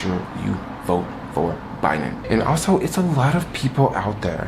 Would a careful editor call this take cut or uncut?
cut